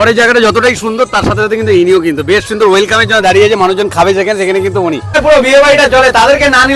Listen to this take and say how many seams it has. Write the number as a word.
one